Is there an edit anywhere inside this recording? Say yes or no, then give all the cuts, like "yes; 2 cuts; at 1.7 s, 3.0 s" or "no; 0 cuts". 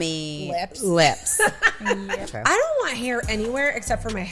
yes; 1 cut; at 2.2 s